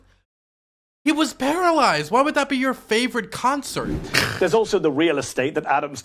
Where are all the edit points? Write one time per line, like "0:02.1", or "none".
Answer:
0:04.0